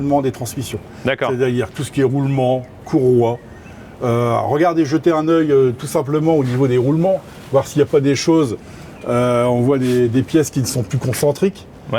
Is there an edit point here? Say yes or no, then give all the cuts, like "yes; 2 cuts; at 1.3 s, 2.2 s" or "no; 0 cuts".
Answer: no; 0 cuts